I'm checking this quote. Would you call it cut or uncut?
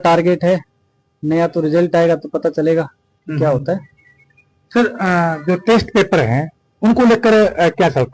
uncut